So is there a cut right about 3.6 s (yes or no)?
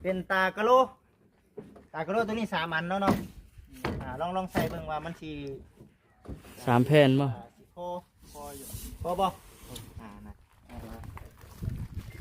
no